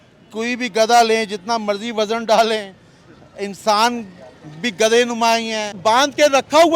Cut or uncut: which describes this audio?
cut